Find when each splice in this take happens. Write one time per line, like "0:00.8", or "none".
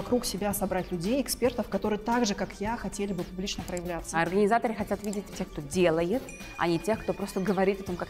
0:04.1
0:05.3

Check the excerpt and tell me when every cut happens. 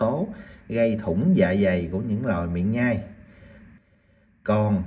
none

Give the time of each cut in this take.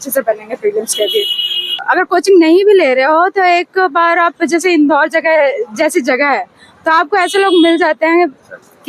0:01.8

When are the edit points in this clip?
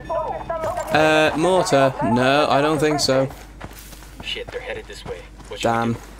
none

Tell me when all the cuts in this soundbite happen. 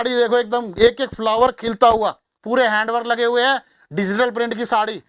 none

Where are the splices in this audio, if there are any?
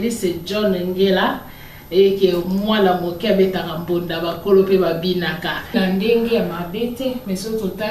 0:05.7

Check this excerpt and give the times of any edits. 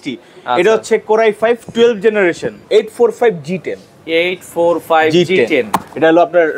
0:02.6

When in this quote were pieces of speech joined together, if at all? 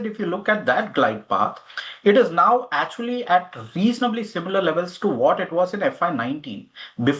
none

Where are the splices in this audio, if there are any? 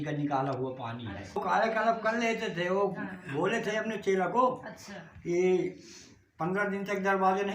0:01.4

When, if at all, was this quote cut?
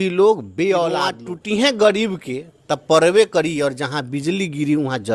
0:01.3

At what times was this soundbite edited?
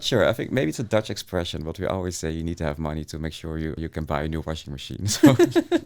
0:03.8

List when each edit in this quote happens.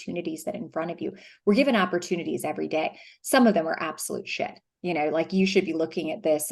none

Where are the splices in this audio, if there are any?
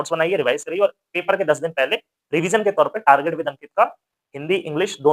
none

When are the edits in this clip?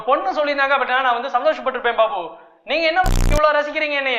none

